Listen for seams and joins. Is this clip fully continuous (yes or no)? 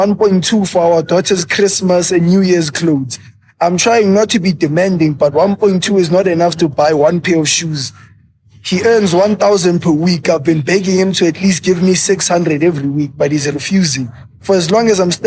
yes